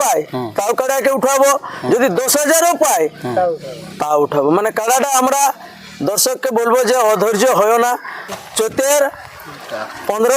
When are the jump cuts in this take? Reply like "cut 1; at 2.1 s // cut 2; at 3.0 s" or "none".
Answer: cut 1; at 8.5 s

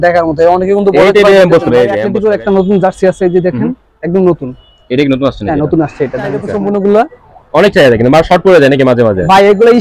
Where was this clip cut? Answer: cut 1; at 2.1 s // cut 2; at 6.4 s

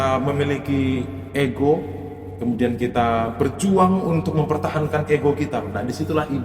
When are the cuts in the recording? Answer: none

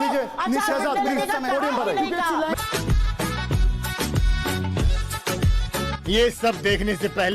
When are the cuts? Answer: cut 1; at 2.6 s

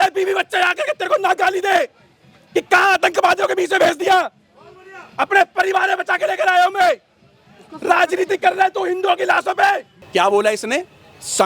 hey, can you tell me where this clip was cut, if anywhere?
cut 1; at 9.9 s

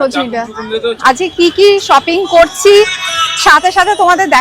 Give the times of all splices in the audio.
cut 1; at 1.0 s

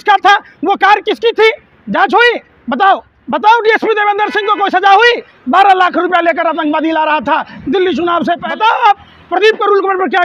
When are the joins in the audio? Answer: cut 1; at 3.1 s // cut 2; at 8.5 s

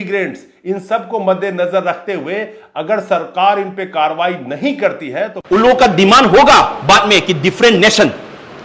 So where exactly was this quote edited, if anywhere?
cut 1; at 5.4 s

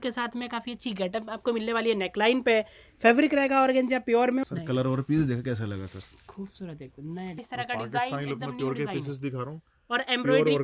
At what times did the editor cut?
cut 1; at 4.4 s // cut 2; at 7.4 s

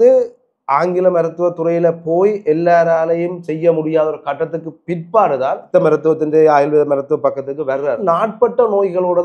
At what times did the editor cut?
cut 1; at 5.6 s // cut 2; at 8.0 s

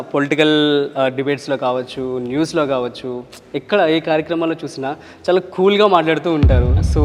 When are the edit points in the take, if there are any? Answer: none

